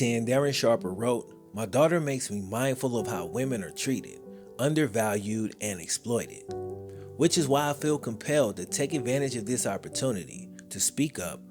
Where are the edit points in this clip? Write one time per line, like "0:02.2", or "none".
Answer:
none